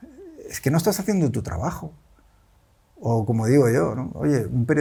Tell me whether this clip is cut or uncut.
uncut